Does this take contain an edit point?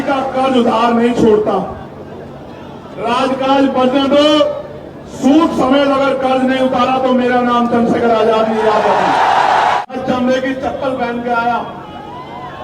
yes; 1 cut; at 9.8 s

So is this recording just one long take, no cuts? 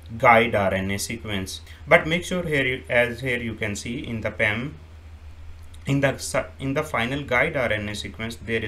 yes; 0 cuts

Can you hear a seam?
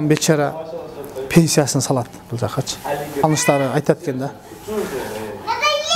yes; 1 cut; at 3.2 s

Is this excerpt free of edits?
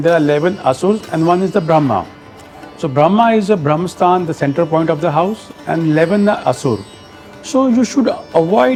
yes; 0 cuts

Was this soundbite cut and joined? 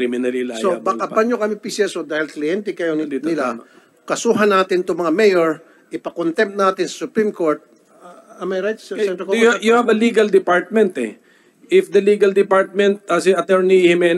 no; 0 cuts

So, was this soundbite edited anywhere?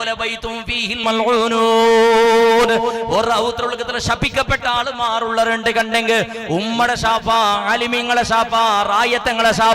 yes; 1 cut; at 1.0 s

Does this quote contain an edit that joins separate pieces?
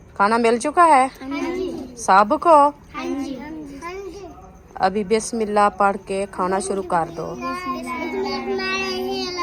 no; 0 cuts

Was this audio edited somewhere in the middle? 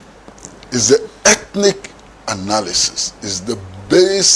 no; 0 cuts

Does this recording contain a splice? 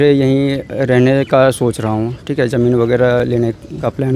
yes; 1 cut; at 3.3 s

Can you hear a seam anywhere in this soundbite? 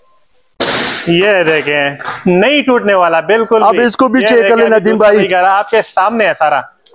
no; 0 cuts

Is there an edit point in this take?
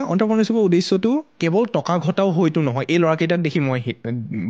yes; 1 cut; at 1.3 s

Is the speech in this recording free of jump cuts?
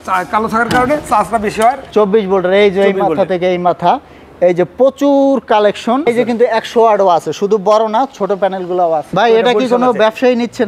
no; 3 cuts; at 1.8 s, 6.1 s, 9.1 s

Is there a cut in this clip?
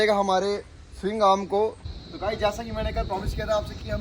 yes; 1 cut; at 1.9 s

